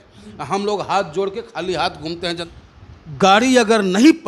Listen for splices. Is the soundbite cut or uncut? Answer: cut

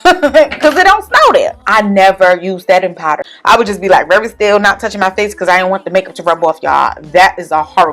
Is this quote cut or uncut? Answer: cut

